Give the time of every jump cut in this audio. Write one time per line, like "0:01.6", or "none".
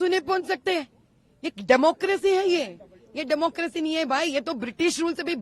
none